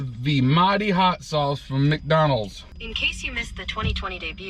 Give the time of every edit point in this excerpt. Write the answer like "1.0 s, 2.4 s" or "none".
2.7 s